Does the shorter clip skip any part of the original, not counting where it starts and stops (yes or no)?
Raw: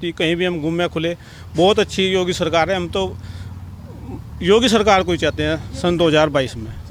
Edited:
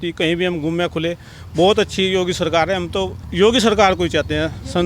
yes